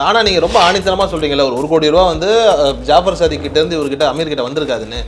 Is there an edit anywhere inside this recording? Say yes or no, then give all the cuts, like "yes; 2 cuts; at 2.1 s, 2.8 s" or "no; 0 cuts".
no; 0 cuts